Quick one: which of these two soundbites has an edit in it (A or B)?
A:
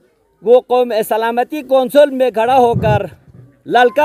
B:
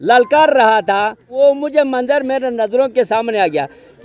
B